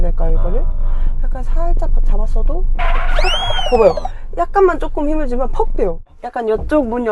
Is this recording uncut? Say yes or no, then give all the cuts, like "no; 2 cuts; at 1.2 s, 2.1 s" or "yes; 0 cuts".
no; 1 cut; at 6.1 s